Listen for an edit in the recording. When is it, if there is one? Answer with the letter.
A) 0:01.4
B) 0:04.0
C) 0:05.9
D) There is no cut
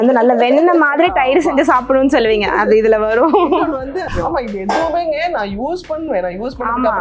B